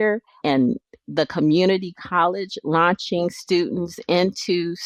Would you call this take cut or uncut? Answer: uncut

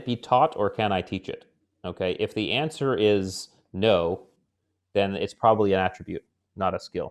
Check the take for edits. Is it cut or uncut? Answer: uncut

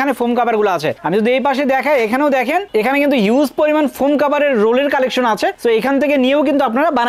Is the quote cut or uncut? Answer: uncut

